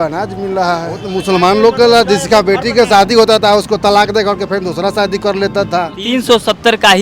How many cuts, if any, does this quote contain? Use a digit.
2